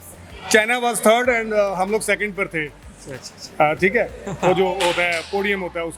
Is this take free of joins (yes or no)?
yes